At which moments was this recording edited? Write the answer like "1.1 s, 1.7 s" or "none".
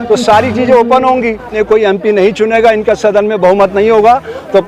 1.5 s